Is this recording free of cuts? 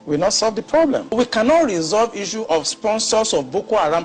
no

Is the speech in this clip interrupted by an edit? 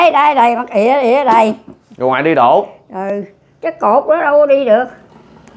no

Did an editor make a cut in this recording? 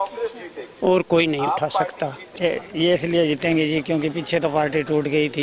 yes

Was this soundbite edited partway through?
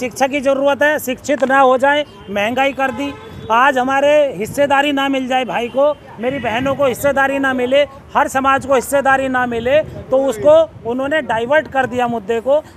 no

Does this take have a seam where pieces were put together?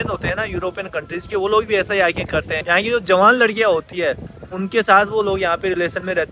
no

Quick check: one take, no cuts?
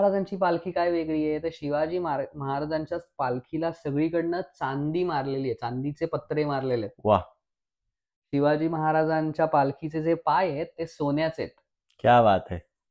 yes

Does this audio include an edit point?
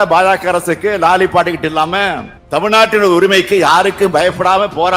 no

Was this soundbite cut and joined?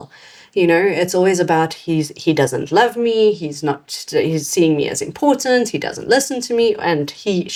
no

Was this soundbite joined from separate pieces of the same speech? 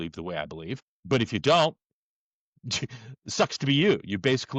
yes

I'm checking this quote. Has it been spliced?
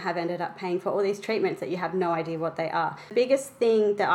yes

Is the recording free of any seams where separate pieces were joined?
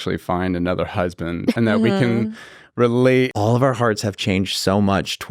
no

